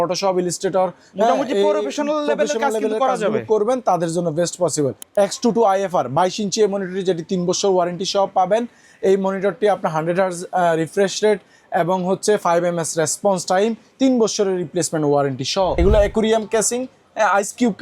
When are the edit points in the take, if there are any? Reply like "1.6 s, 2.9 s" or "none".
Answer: 5.0 s, 15.8 s